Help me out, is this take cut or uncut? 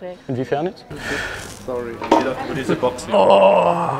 cut